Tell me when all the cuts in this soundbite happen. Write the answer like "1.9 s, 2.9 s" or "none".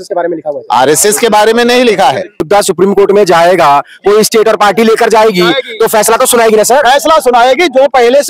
2.4 s